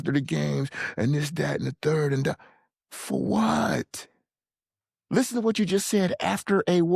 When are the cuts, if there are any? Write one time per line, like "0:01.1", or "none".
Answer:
none